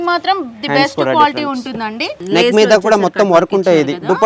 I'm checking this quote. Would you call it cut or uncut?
cut